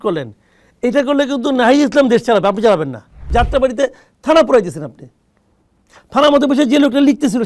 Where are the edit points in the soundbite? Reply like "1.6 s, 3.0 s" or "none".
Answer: 3.2 s